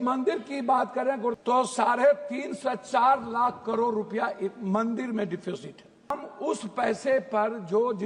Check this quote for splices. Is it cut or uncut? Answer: cut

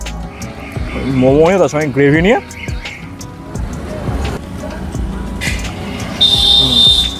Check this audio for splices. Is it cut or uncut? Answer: uncut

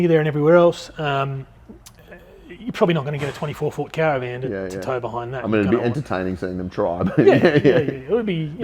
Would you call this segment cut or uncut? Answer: uncut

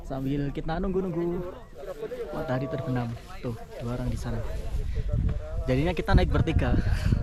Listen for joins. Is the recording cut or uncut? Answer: uncut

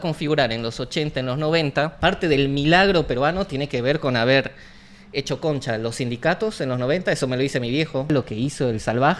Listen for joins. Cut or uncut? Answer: cut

